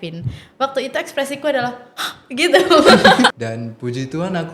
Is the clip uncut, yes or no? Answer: no